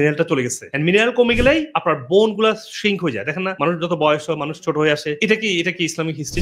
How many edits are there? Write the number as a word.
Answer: zero